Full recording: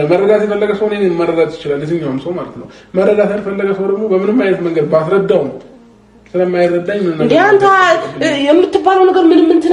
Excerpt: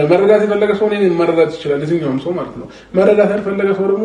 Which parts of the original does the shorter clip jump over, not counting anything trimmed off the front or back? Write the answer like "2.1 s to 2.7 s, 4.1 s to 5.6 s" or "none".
none